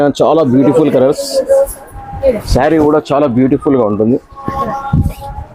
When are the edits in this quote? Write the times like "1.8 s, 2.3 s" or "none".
none

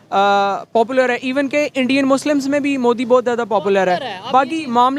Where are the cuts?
none

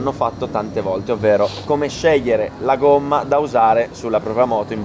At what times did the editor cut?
1.6 s

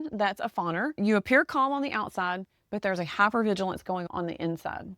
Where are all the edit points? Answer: 0.9 s

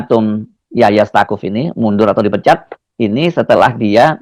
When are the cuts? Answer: none

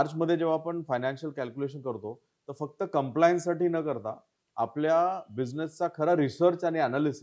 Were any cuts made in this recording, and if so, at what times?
none

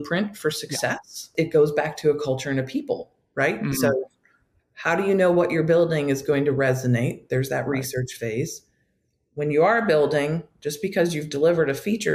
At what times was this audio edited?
1.3 s

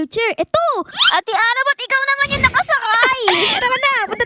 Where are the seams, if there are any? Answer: 0.9 s

